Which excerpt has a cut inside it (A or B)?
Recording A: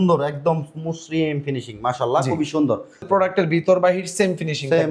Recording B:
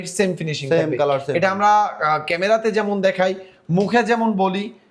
A